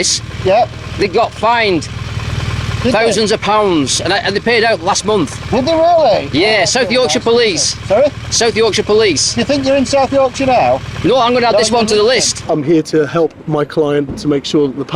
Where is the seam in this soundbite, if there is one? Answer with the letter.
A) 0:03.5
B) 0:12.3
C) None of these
B